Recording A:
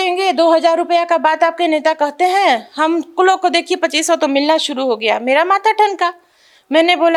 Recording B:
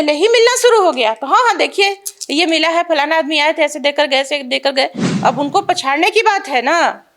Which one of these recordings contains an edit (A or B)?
B